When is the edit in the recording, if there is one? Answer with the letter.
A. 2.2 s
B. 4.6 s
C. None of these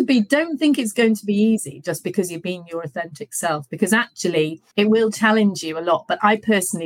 B